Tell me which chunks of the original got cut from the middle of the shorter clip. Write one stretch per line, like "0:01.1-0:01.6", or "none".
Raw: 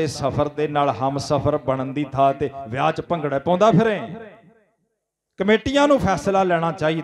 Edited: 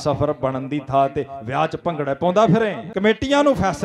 0:04.1-0:05.3